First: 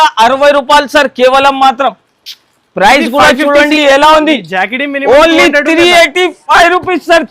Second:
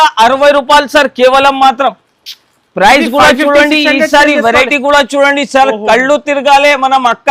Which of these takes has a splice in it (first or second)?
first